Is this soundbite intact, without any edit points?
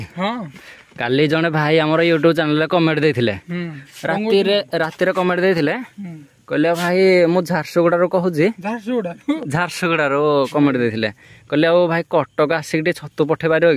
yes; 0 cuts

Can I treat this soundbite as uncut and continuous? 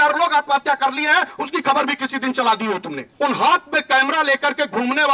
no; 1 cut; at 3.0 s

